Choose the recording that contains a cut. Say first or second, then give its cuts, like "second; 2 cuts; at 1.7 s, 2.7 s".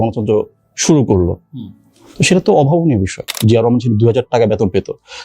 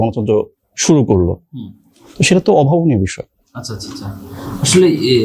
first; 1 cut; at 3.3 s